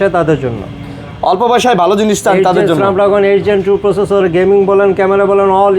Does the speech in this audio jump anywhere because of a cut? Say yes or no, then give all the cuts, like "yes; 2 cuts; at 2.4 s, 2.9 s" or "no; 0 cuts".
no; 0 cuts